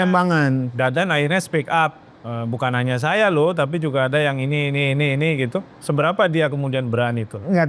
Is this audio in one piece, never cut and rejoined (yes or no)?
yes